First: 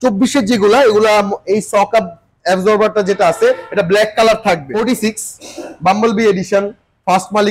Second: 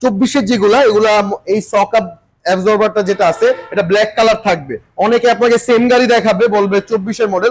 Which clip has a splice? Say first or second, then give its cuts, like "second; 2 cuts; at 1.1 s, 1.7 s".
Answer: first; 1 cut; at 4.7 s